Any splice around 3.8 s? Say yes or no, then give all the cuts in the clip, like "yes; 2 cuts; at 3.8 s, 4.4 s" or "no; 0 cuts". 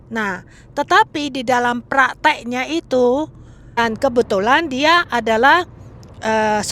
yes; 1 cut; at 3.8 s